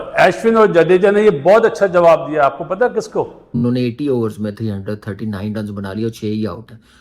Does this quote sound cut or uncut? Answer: cut